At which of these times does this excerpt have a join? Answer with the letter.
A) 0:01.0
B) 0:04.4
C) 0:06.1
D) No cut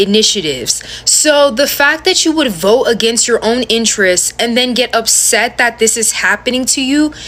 D